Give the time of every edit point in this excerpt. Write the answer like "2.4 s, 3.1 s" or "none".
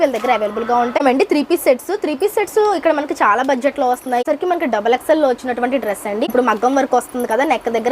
1.0 s, 4.2 s, 6.3 s

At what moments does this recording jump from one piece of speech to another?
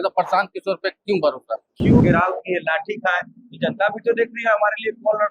2.0 s

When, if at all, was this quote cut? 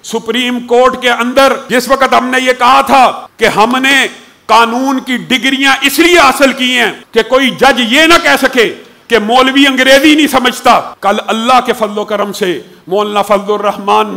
1.6 s, 3.3 s, 6.9 s, 10.9 s

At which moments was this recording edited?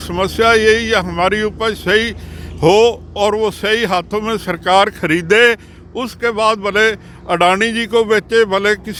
none

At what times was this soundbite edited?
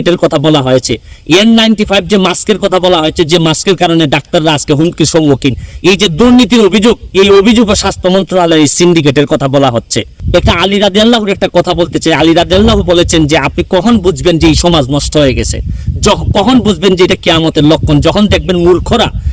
none

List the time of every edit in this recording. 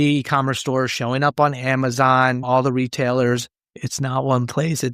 3.8 s

